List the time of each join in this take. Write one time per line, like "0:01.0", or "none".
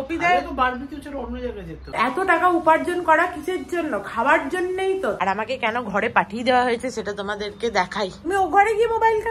0:01.8
0:05.2
0:08.2